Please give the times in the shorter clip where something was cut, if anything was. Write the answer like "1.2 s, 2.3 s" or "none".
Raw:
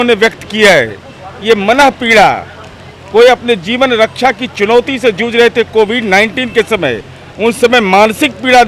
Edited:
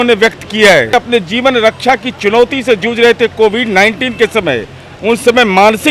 0.9 s